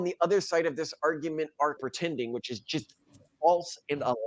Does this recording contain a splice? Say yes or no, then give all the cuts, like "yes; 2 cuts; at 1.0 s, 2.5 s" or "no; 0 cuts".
yes; 1 cut; at 1.8 s